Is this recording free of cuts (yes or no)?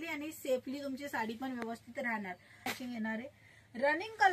no